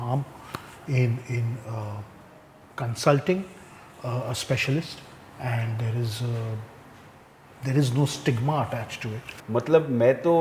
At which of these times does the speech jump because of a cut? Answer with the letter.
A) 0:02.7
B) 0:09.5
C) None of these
B